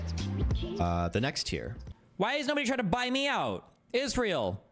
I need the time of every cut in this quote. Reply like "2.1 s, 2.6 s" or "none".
1.8 s